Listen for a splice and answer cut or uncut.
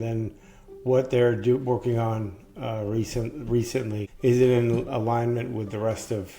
cut